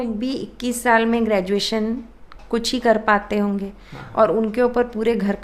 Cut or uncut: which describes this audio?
uncut